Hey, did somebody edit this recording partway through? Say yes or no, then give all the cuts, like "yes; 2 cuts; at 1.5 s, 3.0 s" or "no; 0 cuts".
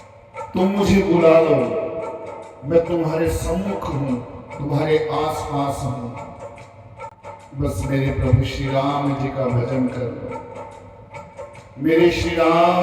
no; 0 cuts